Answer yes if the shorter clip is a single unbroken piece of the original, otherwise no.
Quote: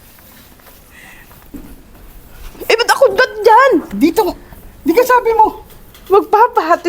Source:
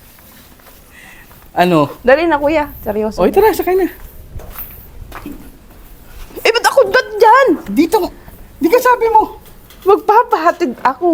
no